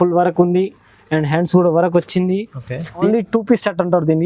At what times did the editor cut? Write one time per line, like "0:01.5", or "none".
0:03.1